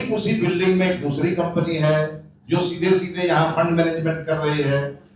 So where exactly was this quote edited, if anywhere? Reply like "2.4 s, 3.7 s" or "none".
none